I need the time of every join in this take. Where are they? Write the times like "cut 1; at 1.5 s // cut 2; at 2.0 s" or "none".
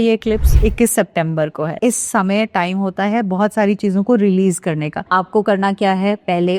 cut 1; at 1.7 s // cut 2; at 4.9 s